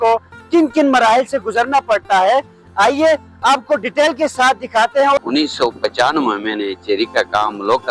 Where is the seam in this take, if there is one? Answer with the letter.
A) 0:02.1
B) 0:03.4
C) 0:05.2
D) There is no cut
C